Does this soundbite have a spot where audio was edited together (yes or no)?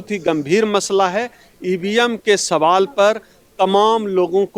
no